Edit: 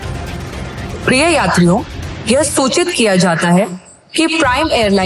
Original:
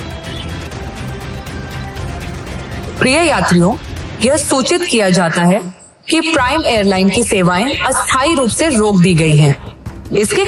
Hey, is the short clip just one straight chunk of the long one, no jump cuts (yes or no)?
yes